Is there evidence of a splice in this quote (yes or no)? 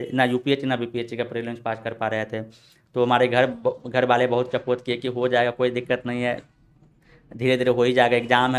no